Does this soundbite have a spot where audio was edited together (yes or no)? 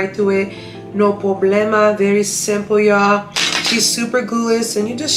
no